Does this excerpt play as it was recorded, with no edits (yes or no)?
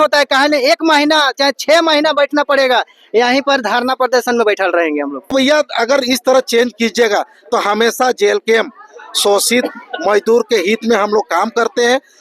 no